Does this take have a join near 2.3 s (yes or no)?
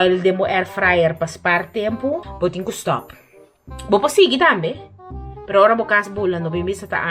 yes